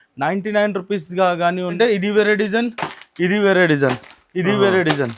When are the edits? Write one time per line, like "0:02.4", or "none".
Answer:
0:01.7